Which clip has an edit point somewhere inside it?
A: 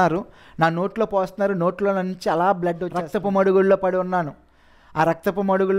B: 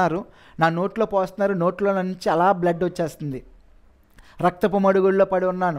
A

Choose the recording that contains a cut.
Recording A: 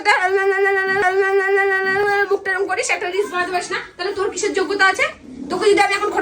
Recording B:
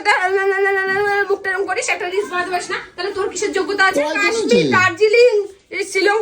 B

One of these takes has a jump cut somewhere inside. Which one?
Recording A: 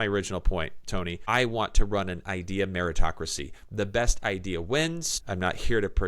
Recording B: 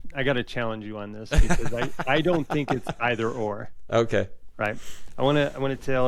A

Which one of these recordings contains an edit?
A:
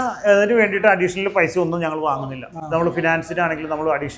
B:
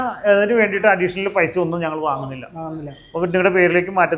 A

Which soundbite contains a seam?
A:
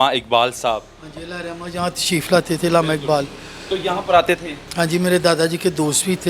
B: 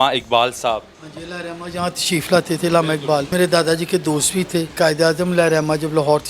B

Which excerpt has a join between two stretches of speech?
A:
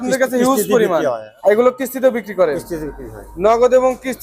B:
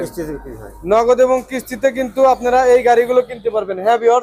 A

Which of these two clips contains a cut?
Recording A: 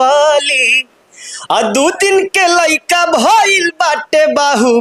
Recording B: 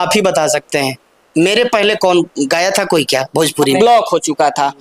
B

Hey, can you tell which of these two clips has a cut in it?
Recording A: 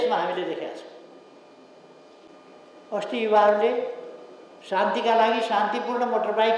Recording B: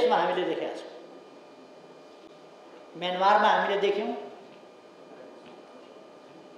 A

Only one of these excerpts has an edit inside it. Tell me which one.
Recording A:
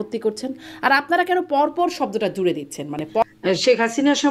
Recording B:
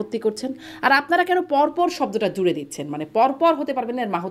A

